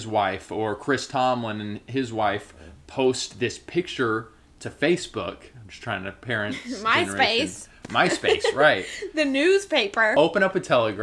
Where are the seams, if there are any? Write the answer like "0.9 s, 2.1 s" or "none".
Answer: 10.1 s